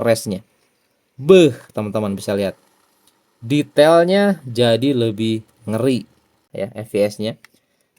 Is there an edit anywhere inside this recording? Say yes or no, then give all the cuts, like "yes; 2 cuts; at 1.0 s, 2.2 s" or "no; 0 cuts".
yes; 1 cut; at 6.4 s